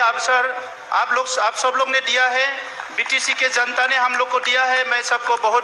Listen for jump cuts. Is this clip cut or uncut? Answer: uncut